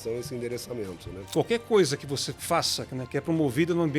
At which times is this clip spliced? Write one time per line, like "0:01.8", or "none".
0:01.1
0:02.3

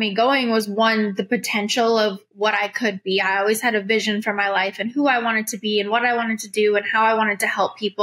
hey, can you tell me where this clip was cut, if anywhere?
none

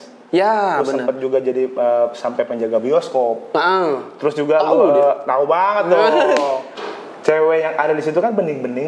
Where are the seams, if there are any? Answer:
0:06.7

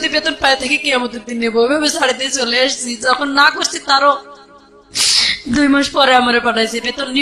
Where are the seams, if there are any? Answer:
none

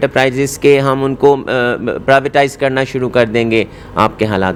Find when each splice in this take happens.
none

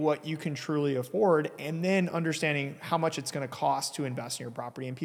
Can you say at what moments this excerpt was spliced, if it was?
none

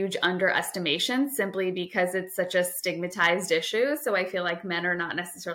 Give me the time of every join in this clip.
none

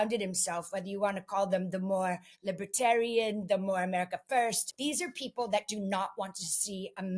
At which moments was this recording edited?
0:04.7

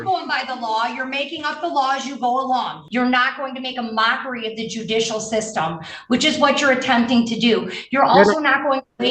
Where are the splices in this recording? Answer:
0:02.8

